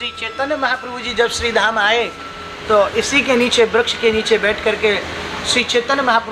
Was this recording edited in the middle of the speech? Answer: no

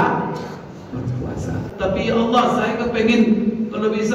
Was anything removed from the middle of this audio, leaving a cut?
yes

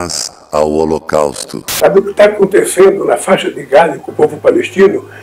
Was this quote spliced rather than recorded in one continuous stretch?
yes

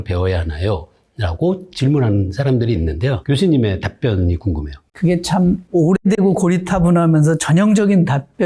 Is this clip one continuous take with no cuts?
yes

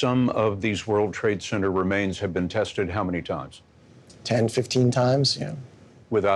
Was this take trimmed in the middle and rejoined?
no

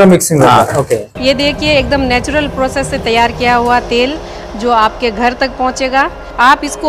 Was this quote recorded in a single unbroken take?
no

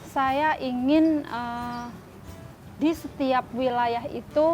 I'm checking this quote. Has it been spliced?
no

